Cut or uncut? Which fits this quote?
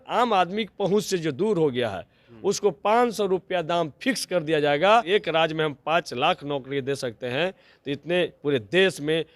cut